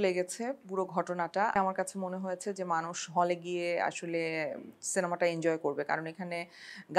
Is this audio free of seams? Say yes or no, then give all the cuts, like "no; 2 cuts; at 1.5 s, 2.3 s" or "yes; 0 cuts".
no; 1 cut; at 1.5 s